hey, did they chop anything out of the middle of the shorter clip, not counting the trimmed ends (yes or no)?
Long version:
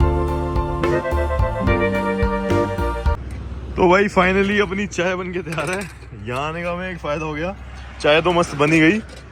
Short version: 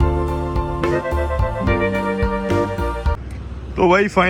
no